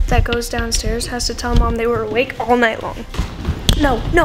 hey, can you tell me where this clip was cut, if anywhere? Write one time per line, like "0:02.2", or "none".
none